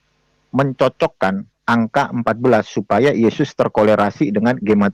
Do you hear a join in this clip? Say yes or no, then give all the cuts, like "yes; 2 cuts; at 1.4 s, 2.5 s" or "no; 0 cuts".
no; 0 cuts